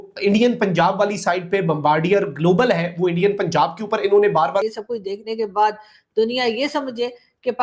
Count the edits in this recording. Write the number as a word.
one